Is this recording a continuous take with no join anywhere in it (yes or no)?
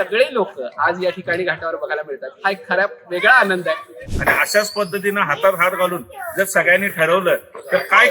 no